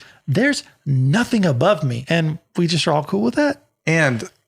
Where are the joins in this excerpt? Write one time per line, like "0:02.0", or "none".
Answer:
0:01.9